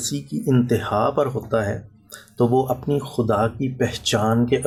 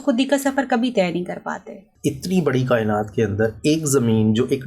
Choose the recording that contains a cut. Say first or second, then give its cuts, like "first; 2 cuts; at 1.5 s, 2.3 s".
second; 1 cut; at 1.9 s